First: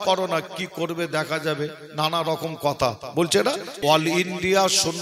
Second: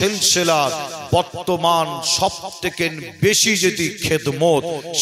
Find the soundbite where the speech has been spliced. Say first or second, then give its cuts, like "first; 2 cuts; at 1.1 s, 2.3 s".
first; 1 cut; at 3.7 s